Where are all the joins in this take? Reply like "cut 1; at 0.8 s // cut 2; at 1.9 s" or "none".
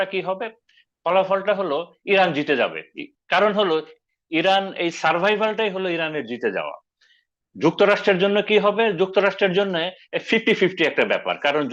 none